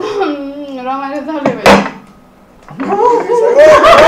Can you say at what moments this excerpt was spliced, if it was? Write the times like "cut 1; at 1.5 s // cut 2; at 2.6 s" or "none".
none